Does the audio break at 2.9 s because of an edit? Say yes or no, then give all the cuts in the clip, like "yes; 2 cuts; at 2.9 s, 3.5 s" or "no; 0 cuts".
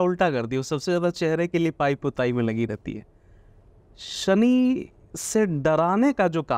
no; 0 cuts